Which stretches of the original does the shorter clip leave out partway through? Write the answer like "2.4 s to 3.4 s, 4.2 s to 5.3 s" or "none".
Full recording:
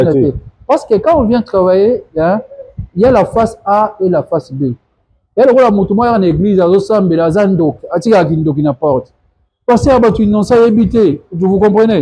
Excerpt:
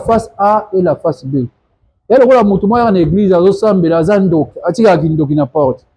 none